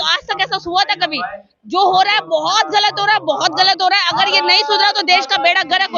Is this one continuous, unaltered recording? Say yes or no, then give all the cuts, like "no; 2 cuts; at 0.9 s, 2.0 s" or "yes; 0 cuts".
yes; 0 cuts